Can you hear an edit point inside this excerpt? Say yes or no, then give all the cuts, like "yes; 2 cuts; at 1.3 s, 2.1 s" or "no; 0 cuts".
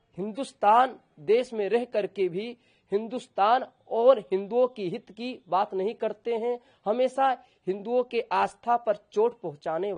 no; 0 cuts